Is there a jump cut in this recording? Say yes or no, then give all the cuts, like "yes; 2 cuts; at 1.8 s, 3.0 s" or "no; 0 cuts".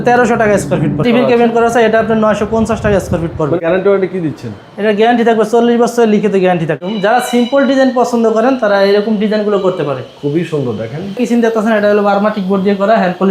yes; 4 cuts; at 1.0 s, 3.6 s, 6.8 s, 11.2 s